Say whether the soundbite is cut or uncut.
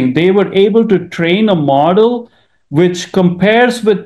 uncut